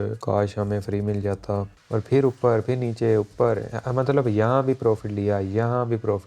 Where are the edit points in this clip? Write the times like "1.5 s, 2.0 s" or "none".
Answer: 1.7 s